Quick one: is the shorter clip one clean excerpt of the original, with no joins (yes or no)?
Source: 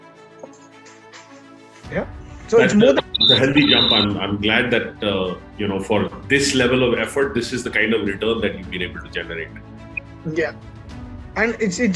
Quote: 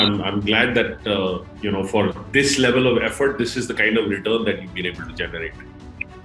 yes